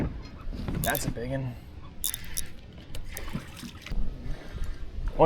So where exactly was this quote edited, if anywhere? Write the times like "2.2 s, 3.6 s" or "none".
3.9 s